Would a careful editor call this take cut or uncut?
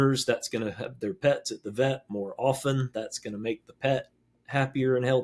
uncut